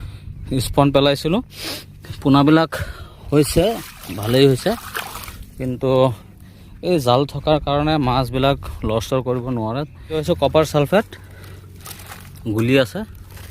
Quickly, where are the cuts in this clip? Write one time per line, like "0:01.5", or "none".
0:10.2